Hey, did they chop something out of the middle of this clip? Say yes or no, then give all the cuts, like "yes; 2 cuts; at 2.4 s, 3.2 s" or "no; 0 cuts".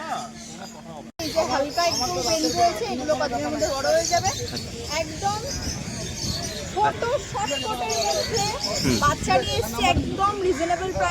yes; 1 cut; at 1.2 s